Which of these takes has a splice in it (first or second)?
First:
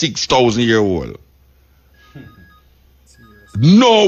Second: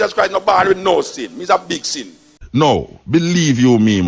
second